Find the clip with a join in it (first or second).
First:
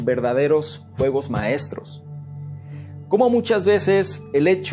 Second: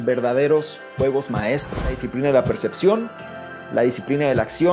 second